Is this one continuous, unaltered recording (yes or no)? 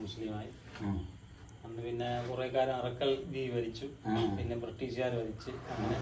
yes